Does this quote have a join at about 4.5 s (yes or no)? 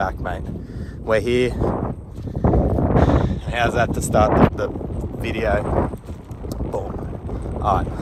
yes